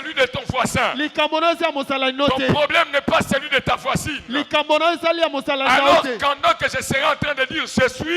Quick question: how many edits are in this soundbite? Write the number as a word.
zero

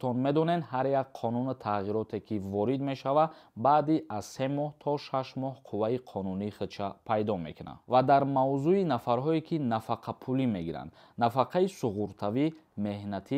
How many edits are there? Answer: zero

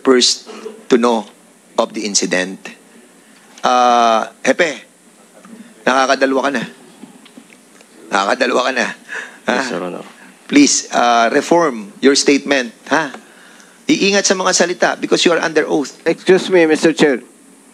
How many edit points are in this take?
one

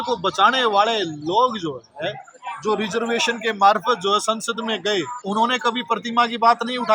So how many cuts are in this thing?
one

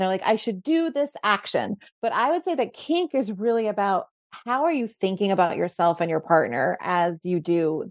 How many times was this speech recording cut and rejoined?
zero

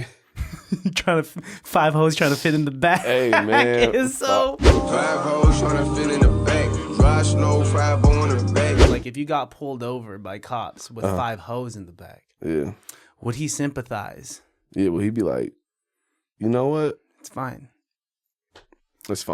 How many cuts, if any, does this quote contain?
one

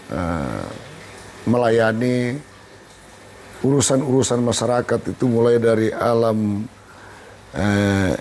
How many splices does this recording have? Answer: zero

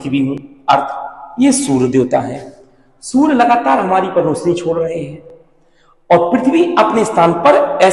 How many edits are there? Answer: zero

